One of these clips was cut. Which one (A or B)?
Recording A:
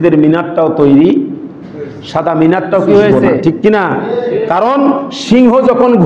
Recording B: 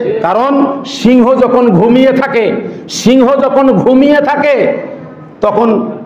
A